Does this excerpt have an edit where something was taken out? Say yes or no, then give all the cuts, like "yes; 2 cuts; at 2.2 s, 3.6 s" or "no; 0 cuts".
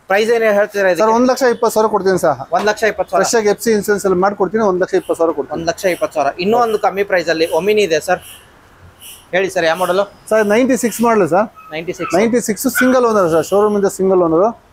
no; 0 cuts